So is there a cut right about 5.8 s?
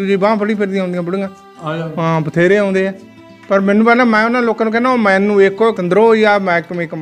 yes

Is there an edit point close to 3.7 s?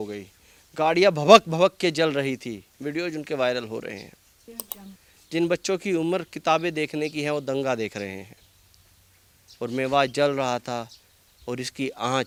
no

